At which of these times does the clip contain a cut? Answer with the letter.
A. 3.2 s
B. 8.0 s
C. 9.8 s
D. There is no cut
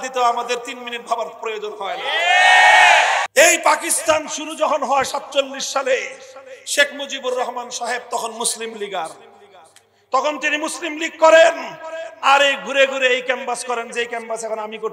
A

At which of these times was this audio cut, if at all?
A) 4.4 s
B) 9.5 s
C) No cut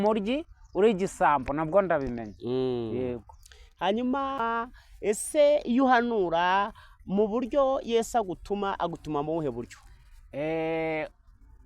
A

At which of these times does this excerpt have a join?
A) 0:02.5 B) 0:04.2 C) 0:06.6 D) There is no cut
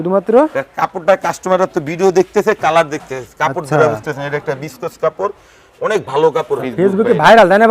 C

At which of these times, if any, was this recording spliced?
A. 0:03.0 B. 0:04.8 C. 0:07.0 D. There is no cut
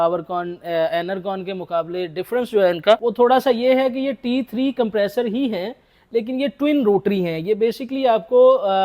A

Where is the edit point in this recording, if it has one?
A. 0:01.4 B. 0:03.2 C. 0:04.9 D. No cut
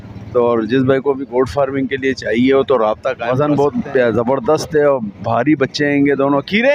B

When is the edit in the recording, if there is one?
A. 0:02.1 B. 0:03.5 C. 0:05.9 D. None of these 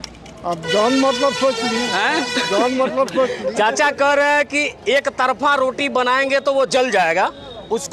D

